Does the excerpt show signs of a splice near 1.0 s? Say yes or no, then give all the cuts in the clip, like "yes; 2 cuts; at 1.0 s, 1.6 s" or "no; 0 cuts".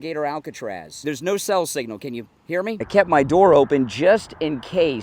yes; 2 cuts; at 1.0 s, 2.8 s